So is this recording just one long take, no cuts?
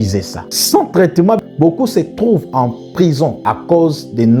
yes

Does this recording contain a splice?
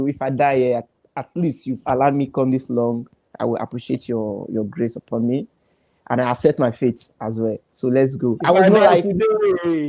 no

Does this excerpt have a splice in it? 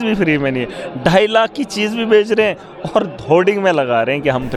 no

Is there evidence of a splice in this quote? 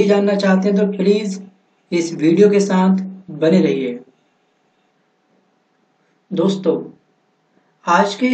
no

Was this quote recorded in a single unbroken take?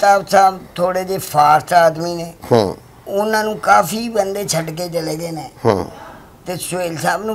yes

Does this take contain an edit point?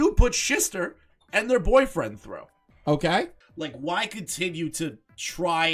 yes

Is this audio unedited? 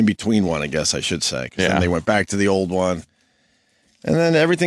yes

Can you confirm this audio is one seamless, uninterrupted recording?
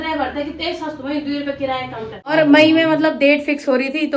no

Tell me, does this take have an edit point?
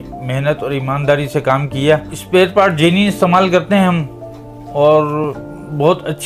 no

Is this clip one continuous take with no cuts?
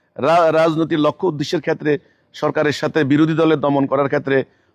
yes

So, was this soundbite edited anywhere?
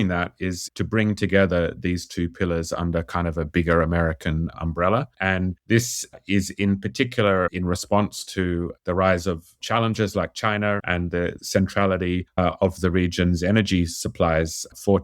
yes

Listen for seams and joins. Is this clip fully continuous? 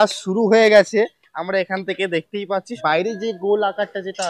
no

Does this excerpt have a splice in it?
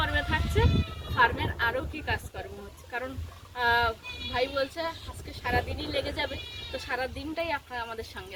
no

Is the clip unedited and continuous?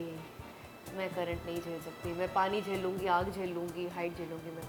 yes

